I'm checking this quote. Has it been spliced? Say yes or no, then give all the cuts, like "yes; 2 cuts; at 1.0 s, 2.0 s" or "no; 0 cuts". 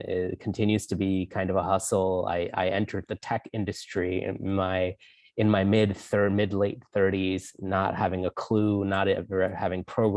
no; 0 cuts